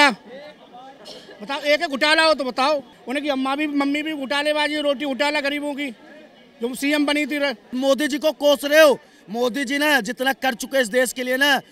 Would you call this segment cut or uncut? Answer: cut